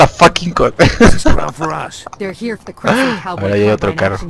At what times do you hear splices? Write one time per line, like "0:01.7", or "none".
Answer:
0:03.0

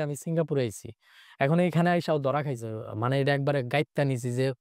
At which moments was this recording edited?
0:02.8

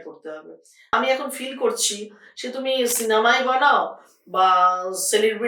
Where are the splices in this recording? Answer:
0:00.9

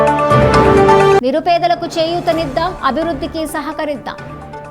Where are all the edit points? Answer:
0:01.2

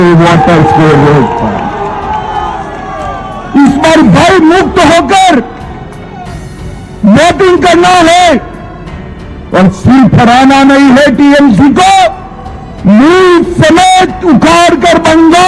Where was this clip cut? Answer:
none

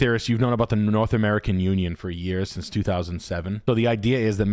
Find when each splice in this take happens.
0:03.6

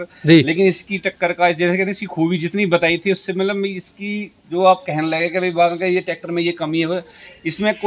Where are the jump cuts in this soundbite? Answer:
none

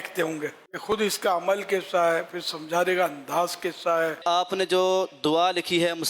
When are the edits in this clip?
0:00.9
0:04.2

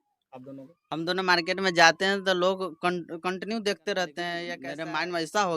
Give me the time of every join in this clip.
0:04.5

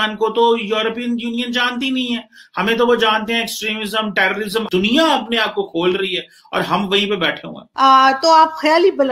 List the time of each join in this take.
0:04.7
0:07.6

